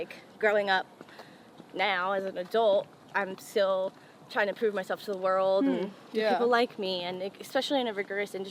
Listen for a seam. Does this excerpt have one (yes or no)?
no